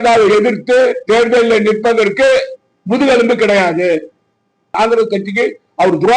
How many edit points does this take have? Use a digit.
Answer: 1